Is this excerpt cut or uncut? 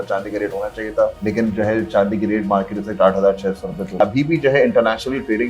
cut